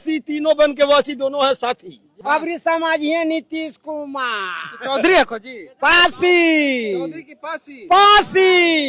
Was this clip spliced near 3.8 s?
no; 1 cut; at 2.1 s

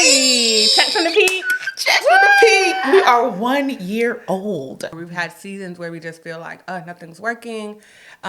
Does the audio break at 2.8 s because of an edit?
no; 1 cut; at 4.9 s

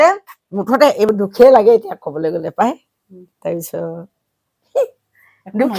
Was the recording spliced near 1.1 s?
yes; 1 cut; at 1.1 s

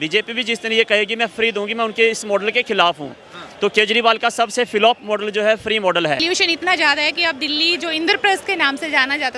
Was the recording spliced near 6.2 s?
yes; 1 cut; at 6.2 s

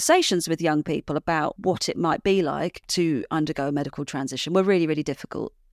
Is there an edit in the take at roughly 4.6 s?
no; 1 cut; at 1.6 s

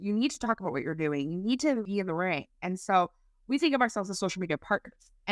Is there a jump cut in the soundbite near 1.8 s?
yes; 1 cut; at 1.8 s

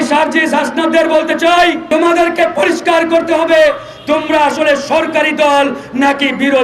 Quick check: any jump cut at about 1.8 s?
yes; 1 cut; at 1.8 s

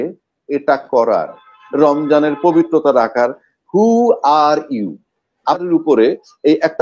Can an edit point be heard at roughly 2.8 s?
no; 1 cut; at 5.6 s

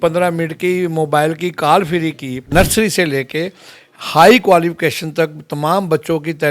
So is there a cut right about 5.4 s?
no; 1 cut; at 2.5 s

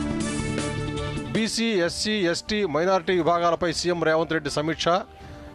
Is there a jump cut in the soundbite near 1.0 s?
yes; 1 cut; at 1.0 s

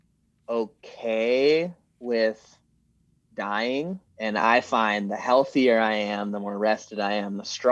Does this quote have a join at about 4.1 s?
yes; 1 cut; at 4.1 s

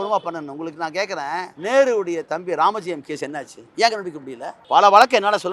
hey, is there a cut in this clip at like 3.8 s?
yes; 3 cuts; at 1.5 s, 3.8 s, 4.8 s

